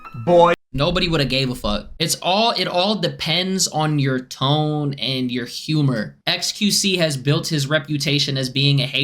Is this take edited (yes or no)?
yes